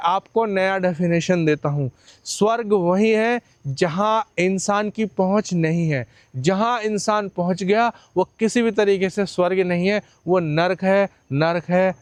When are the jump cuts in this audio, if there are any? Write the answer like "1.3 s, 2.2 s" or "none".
none